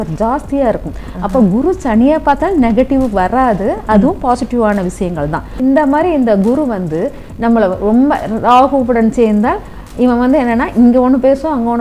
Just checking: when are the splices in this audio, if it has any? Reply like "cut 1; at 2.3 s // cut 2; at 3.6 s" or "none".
cut 1; at 5.5 s